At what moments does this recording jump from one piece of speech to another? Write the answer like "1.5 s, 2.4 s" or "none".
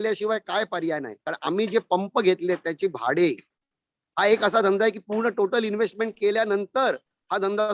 none